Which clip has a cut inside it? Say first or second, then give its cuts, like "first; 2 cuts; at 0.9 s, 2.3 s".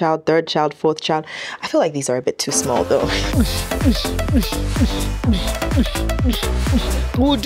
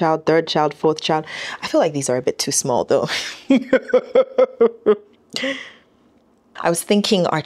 first; 1 cut; at 3.2 s